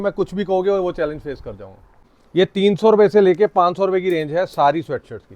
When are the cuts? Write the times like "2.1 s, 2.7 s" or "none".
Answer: 2.0 s